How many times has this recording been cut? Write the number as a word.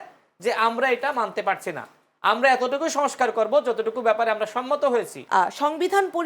one